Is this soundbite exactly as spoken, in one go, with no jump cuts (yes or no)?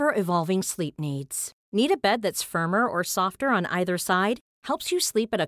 yes